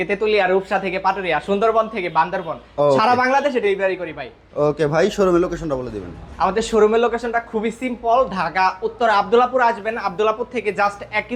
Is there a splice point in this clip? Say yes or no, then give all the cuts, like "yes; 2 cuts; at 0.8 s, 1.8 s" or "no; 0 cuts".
no; 0 cuts